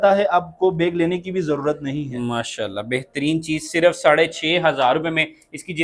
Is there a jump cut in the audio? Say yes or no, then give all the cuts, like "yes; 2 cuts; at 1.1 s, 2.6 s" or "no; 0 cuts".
no; 0 cuts